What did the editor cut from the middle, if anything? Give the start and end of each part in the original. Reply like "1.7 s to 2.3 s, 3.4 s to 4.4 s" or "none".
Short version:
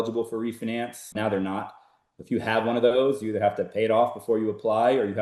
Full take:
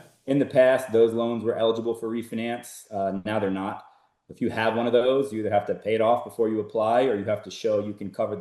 2.8 s to 3.2 s